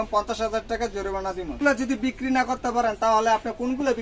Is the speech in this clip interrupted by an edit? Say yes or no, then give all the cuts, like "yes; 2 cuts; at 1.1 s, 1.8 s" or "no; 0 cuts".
yes; 1 cut; at 1.6 s